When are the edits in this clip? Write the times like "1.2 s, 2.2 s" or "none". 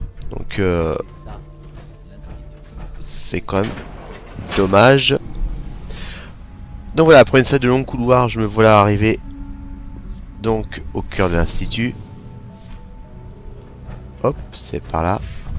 7.7 s